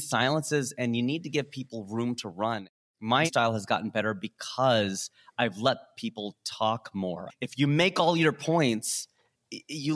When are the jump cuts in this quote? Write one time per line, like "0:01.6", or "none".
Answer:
0:03.3
0:07.2